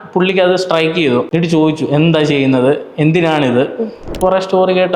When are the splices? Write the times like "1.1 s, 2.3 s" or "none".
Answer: 1.3 s, 4.1 s